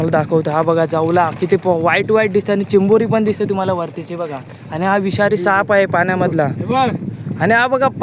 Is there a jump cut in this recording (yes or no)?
no